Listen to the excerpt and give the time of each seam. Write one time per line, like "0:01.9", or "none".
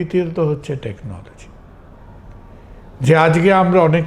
none